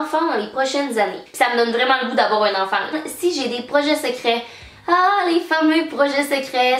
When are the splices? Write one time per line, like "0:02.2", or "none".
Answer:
0:01.2
0:02.9